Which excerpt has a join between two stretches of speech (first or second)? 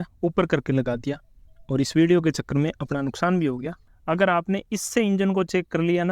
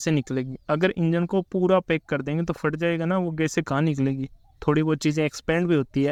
first